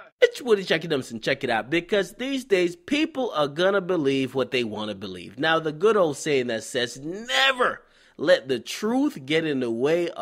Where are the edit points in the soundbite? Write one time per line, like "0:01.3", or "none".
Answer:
none